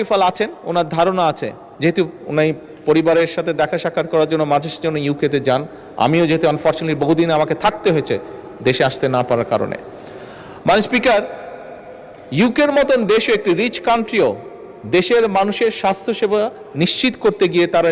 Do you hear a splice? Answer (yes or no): no